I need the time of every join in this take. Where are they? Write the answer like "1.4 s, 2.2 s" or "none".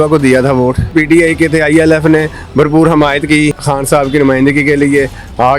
0.9 s, 3.6 s